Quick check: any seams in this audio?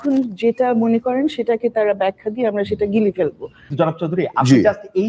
yes; 1 cut; at 3.6 s

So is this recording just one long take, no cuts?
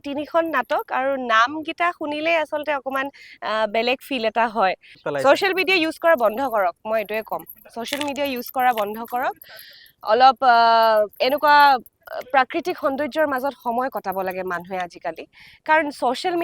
no; 1 cut; at 5.0 s

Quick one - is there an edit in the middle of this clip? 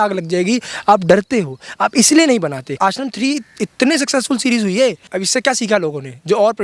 yes; 2 cuts; at 2.7 s, 5.1 s

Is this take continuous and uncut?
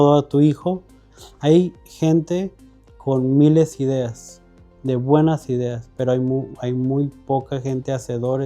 no; 1 cut; at 1.1 s

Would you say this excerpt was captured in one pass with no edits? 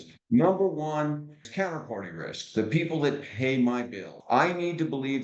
no; 2 cuts; at 1.4 s, 4.1 s

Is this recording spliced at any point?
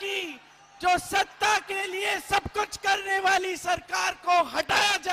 no; 0 cuts

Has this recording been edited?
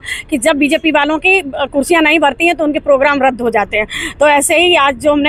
no; 0 cuts

